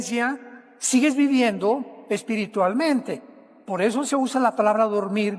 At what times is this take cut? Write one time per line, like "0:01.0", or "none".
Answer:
0:03.6

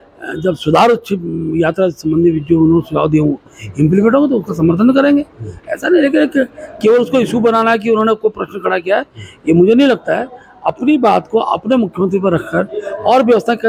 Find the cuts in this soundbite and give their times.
none

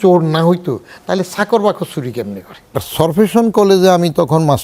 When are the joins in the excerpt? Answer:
0:02.8

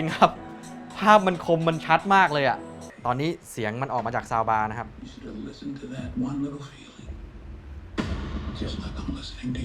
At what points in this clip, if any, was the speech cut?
0:02.9

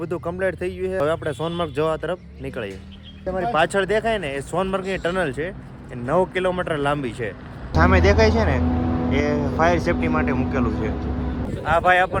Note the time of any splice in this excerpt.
0:01.0
0:03.2
0:07.7
0:11.4

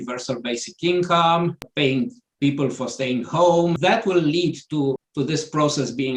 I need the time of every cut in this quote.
0:01.6
0:03.8
0:05.0

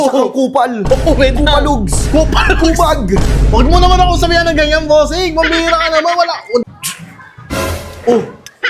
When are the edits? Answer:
0:06.6

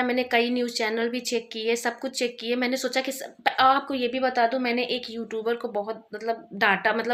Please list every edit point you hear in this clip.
none

